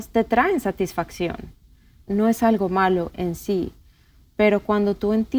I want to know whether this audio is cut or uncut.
cut